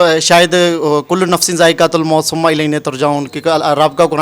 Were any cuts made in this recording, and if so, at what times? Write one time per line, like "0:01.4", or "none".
none